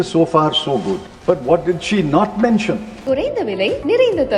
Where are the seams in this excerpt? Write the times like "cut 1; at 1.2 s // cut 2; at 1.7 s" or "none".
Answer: cut 1; at 1.1 s // cut 2; at 3.0 s